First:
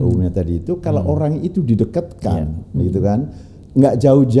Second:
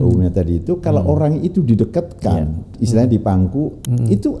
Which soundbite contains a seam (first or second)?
second